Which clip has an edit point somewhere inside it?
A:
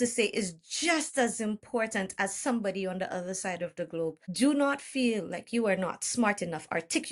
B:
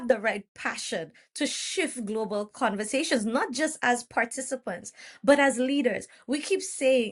A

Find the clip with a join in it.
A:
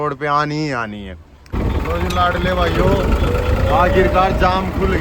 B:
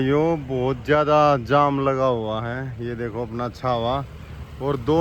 A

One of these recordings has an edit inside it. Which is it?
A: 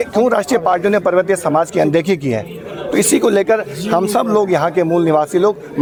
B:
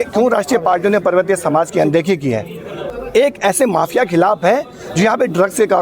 B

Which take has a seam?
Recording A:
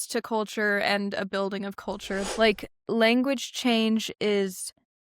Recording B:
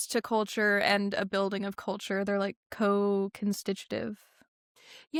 A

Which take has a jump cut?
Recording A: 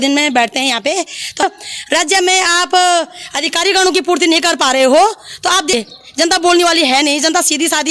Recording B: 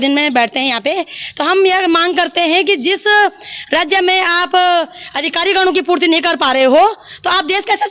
A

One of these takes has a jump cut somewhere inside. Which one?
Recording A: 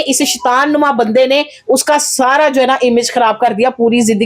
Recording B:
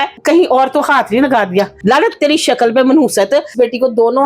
B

